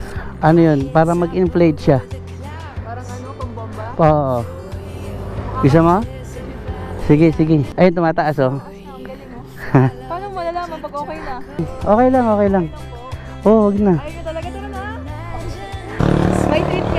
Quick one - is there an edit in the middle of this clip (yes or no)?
yes